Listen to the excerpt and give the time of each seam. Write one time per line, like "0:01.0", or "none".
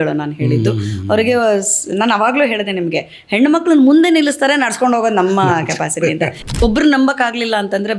0:06.4